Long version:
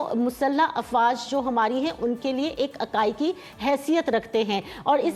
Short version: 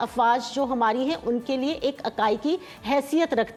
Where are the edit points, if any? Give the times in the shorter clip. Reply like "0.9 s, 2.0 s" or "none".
none